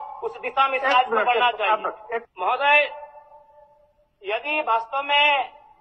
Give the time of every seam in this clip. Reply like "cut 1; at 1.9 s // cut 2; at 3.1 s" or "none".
cut 1; at 2.3 s